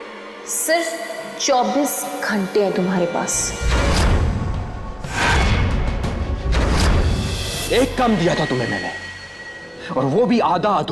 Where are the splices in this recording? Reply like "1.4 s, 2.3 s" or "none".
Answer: 7.5 s